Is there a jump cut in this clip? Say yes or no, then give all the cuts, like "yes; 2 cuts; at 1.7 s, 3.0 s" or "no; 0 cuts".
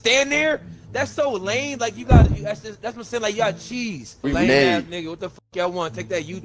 yes; 1 cut; at 4.2 s